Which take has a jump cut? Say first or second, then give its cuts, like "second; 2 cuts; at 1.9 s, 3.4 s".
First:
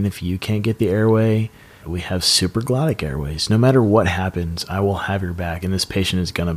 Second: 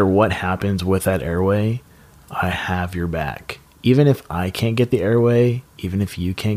first; 1 cut; at 1.9 s